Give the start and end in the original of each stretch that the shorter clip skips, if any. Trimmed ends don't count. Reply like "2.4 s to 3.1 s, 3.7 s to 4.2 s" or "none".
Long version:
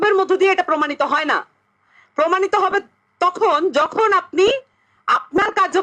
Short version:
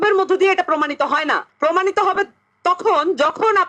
1.5 s to 2.0 s